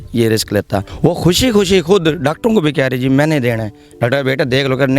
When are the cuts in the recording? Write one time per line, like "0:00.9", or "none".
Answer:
0:00.9